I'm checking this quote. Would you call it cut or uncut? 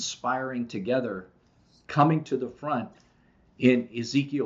uncut